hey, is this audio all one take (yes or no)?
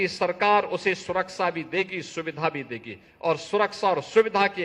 yes